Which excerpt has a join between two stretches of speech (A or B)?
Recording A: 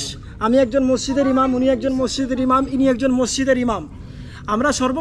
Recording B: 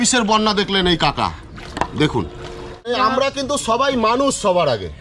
B